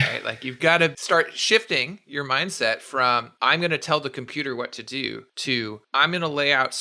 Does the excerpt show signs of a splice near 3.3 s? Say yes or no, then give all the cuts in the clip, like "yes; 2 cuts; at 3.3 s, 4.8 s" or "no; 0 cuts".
yes; 3 cuts; at 0.9 s, 3.3 s, 5.7 s